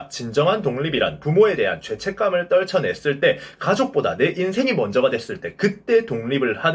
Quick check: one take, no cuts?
yes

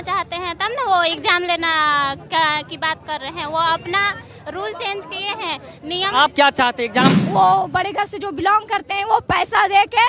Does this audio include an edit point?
yes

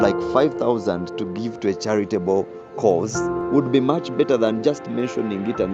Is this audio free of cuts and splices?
no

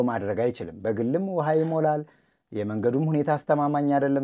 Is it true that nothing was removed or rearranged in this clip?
yes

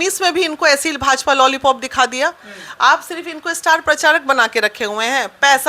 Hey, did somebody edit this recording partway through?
no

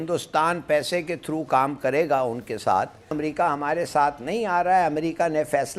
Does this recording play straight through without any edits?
no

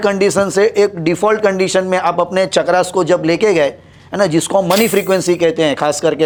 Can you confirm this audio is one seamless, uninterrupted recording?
yes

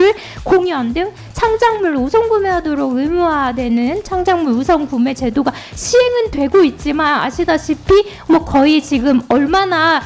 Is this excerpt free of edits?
yes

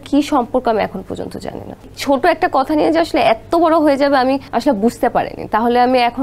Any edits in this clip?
yes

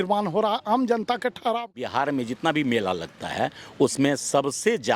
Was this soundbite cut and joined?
yes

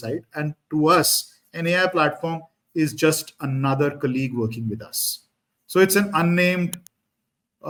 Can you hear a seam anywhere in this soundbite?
no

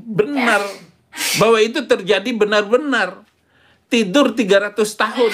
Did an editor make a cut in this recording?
yes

